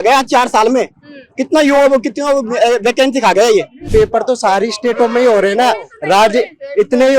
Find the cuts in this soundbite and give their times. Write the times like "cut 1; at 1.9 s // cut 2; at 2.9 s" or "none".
cut 1; at 3.9 s